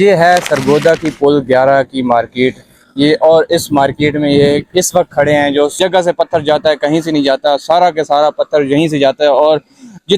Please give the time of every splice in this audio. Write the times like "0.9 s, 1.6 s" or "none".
5.7 s

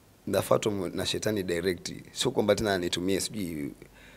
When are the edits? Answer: none

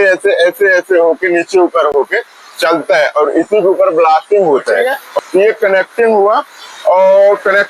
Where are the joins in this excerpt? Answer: 5.0 s

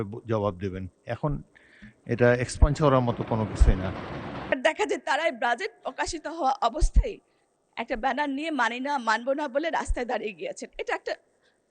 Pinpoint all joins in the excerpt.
4.5 s

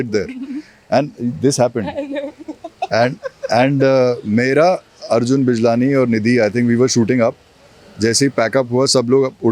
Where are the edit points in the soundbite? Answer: none

